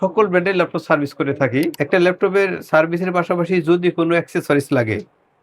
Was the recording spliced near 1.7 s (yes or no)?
yes